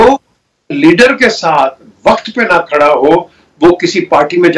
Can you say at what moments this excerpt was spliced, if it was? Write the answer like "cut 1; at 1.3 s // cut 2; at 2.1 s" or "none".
none